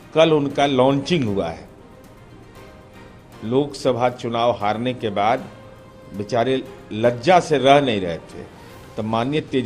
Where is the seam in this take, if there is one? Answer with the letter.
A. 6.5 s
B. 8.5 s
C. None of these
C